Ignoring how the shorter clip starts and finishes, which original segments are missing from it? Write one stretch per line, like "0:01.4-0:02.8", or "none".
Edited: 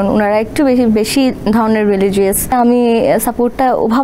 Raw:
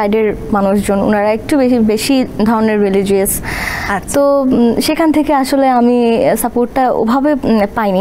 0:03.5-0:05.7